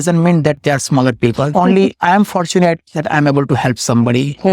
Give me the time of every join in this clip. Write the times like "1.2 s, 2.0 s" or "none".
1.5 s